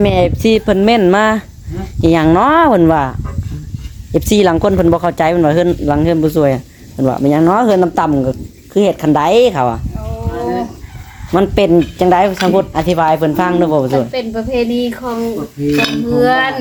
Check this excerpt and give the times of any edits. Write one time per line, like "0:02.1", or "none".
none